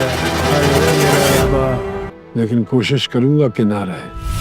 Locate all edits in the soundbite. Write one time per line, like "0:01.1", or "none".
0:02.0